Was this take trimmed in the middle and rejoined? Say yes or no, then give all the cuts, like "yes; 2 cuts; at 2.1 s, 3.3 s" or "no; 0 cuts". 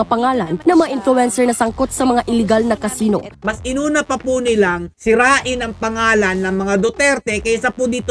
yes; 1 cut; at 3.3 s